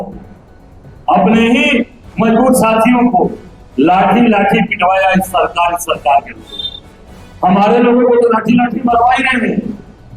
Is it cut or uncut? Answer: uncut